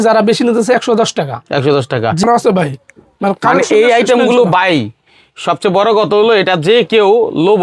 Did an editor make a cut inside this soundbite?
yes; 1 cut; at 2.2 s

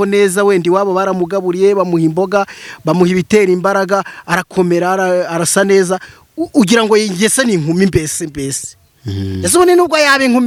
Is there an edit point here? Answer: no; 0 cuts

